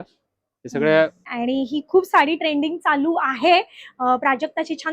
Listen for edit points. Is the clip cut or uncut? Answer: cut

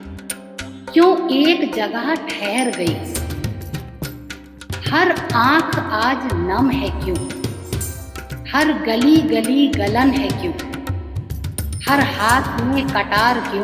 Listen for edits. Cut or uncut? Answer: cut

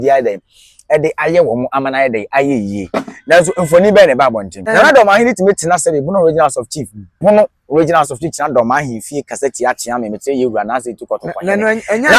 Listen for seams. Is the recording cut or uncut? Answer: cut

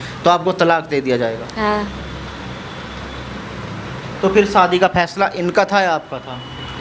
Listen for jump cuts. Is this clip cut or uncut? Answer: cut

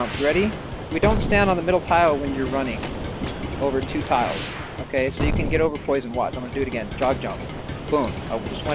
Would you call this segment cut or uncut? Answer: uncut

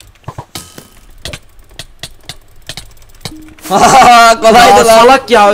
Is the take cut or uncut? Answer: uncut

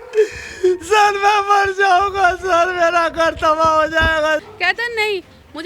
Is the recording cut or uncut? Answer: cut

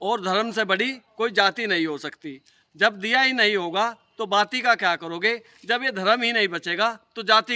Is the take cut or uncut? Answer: uncut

